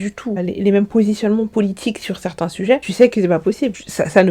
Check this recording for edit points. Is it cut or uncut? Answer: uncut